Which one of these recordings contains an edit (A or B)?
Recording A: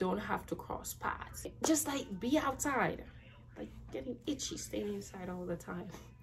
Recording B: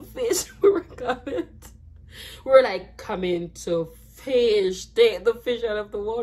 A